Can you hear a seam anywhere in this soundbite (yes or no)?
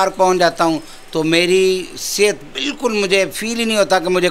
no